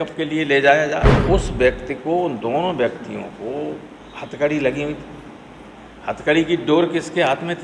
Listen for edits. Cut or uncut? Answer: cut